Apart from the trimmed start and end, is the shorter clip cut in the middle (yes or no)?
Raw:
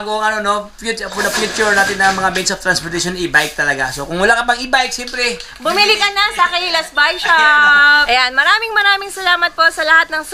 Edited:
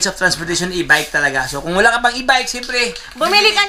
no